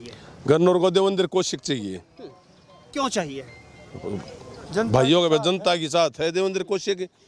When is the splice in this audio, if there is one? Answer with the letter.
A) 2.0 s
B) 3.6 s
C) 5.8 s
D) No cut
D